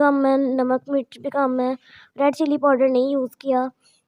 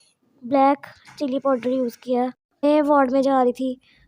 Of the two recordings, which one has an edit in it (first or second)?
second